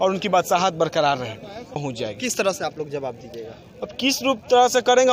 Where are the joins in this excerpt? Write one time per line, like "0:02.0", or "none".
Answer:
0:01.8